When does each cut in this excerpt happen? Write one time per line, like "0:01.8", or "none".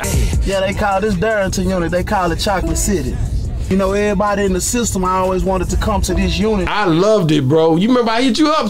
none